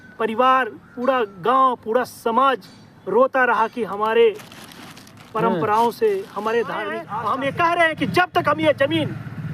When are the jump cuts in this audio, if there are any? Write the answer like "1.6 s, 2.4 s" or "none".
7.0 s